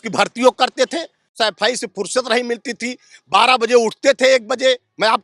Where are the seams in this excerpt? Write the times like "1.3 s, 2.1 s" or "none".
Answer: 1.4 s